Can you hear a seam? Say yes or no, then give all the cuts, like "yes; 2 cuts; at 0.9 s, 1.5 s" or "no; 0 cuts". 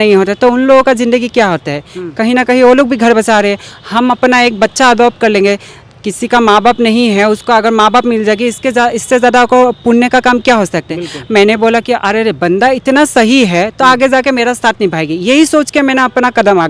no; 0 cuts